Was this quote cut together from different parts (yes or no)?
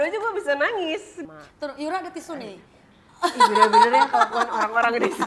yes